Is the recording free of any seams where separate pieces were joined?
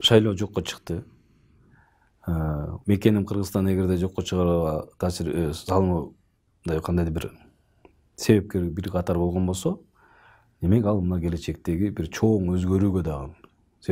yes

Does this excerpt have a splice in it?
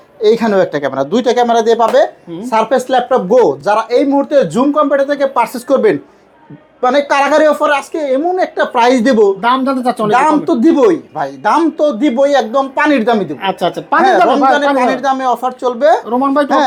no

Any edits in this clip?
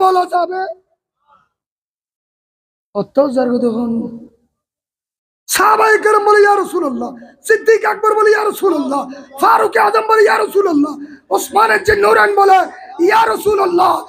no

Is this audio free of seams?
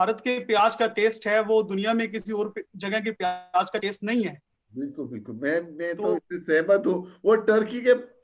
yes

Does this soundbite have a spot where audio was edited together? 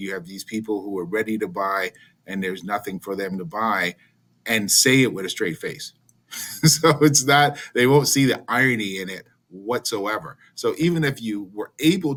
no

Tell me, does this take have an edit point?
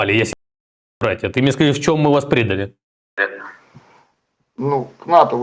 no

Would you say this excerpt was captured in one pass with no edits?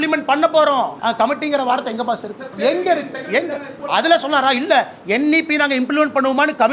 no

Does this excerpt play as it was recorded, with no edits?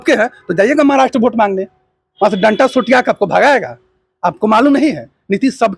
yes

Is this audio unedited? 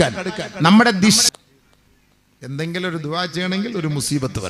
no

